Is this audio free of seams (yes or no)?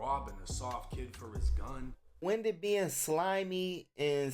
no